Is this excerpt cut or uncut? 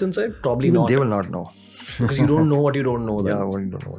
uncut